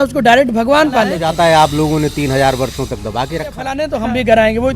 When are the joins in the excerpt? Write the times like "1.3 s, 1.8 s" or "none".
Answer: 1.2 s, 3.7 s